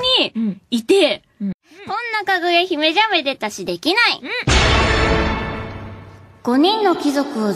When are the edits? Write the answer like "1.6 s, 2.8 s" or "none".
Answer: none